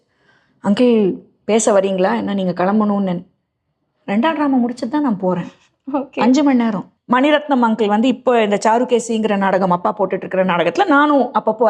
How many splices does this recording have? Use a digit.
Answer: 1